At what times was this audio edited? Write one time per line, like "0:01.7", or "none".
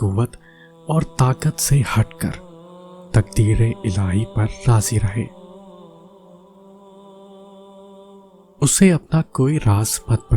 0:05.3
0:07.9